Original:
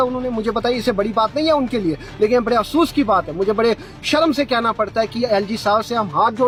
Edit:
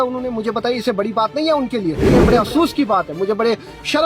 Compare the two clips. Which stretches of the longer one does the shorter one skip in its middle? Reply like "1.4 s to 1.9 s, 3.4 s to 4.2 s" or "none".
2.1 s to 2.3 s